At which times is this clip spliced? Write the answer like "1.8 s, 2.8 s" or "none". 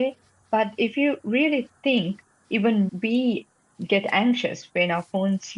2.9 s